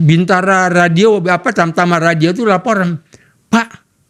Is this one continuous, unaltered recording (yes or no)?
yes